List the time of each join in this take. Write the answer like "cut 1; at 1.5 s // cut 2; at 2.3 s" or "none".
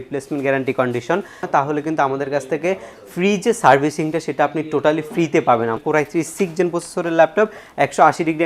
cut 1; at 1.4 s // cut 2; at 5.8 s